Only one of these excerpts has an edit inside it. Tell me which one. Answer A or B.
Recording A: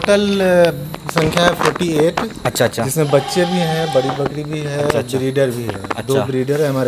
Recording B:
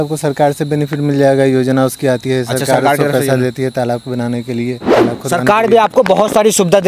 B